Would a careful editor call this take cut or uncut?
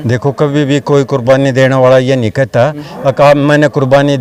uncut